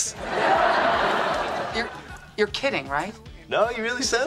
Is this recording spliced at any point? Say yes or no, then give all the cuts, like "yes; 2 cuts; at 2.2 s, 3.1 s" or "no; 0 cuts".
no; 0 cuts